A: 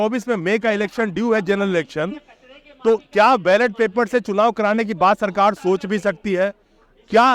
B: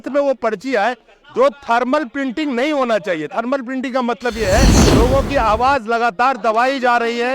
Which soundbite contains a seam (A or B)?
B